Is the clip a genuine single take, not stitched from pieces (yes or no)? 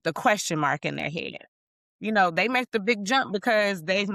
yes